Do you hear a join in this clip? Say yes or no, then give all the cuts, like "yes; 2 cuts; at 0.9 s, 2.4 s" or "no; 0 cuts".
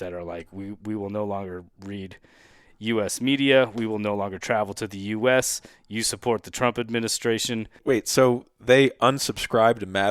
yes; 1 cut; at 7.8 s